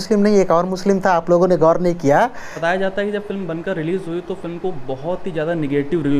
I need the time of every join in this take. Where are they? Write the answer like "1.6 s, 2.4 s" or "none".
2.5 s